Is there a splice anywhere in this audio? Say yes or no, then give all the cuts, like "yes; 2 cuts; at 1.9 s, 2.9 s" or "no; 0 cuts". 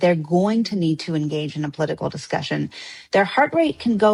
no; 0 cuts